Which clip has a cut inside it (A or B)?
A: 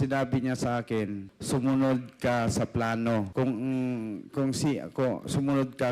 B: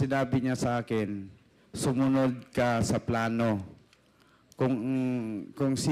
A